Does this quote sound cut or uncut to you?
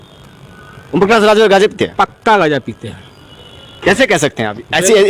uncut